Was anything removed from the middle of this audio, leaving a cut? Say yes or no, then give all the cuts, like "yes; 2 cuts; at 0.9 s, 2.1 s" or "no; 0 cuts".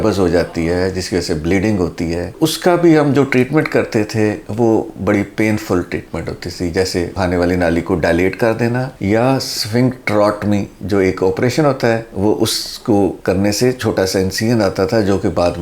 no; 0 cuts